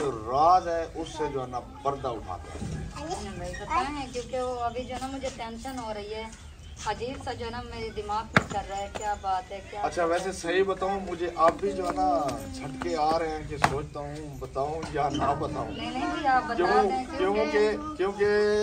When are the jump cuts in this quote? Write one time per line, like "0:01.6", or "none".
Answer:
none